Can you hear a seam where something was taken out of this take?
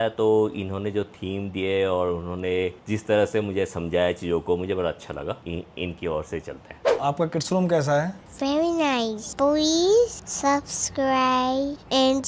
yes; 4 cuts; at 5.4 s, 6.8 s, 9.2 s, 10.2 s

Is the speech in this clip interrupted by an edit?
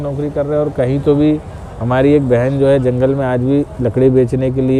no; 0 cuts

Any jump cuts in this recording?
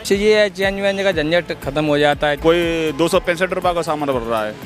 yes; 1 cut; at 2.4 s

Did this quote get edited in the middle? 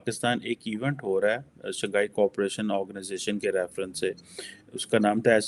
no; 0 cuts

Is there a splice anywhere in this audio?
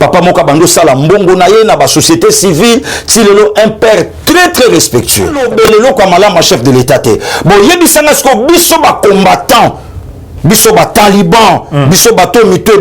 yes; 1 cut; at 5.4 s

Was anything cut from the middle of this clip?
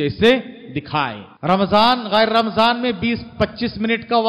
yes; 1 cut; at 1.2 s

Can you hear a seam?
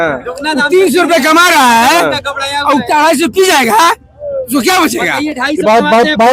no; 0 cuts

